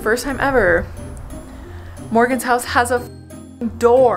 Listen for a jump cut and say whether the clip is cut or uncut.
uncut